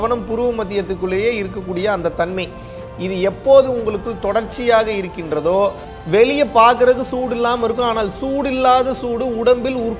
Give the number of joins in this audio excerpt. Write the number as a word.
one